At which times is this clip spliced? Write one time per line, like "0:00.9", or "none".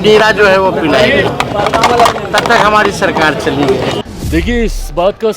0:04.0